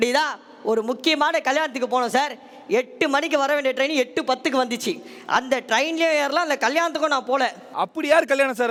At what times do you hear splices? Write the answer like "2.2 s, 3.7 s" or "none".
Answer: none